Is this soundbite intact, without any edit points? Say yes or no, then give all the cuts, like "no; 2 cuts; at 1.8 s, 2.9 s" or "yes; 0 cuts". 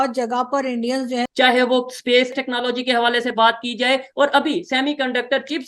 no; 2 cuts; at 1.3 s, 2.3 s